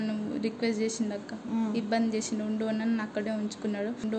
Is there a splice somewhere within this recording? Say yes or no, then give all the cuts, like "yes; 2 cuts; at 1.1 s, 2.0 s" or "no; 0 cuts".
no; 0 cuts